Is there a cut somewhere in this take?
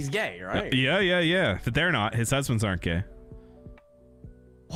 no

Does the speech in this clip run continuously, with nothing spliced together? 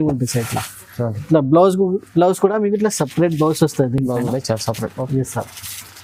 yes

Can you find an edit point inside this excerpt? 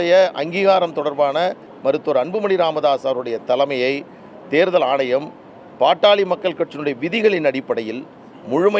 yes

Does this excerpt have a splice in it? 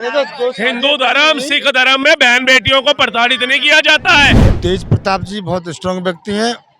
yes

